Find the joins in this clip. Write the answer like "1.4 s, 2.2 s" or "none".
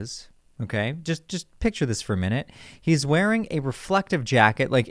none